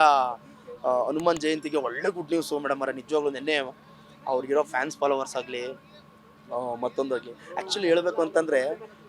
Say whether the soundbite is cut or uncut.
uncut